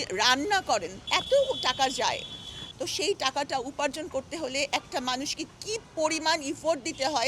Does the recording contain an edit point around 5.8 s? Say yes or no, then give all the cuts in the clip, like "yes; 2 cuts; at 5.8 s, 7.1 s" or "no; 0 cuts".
no; 2 cuts; at 1.1 s, 2.7 s